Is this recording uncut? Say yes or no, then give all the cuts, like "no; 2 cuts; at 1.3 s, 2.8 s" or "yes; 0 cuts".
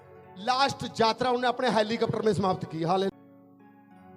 no; 1 cut; at 3.1 s